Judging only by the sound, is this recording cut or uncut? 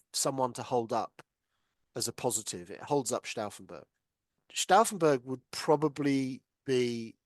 cut